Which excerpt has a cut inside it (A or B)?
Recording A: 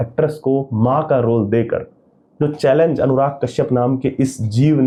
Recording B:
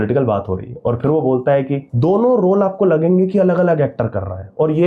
B